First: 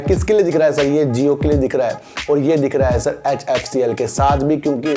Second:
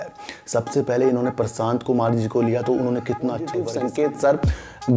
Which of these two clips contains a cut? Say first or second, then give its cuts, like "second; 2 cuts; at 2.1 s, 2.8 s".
second; 1 cut; at 3.6 s